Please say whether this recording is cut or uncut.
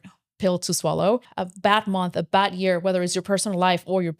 cut